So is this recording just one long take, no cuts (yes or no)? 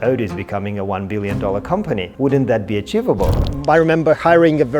no